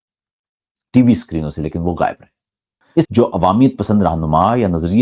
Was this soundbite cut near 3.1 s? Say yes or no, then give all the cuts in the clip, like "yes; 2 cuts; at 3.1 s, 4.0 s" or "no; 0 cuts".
yes; 1 cut; at 3.1 s